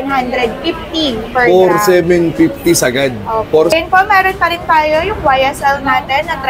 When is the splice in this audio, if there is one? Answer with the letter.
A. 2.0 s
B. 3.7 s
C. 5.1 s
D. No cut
B